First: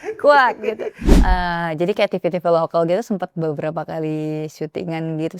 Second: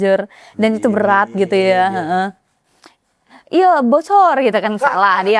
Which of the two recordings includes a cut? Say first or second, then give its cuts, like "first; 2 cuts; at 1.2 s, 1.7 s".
first; 1 cut; at 1.0 s